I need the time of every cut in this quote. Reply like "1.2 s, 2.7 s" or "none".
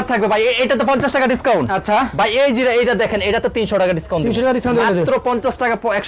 none